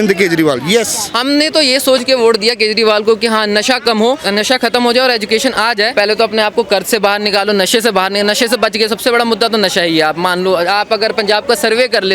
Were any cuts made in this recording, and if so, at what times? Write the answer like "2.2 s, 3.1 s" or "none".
1.0 s, 4.2 s, 5.9 s